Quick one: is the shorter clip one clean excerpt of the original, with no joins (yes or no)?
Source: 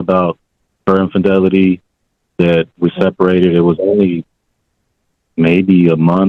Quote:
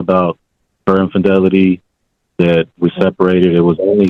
yes